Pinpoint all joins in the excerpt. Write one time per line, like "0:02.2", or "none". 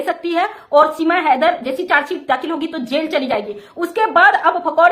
none